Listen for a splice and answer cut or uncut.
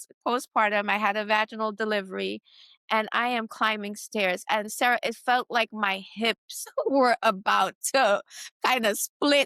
uncut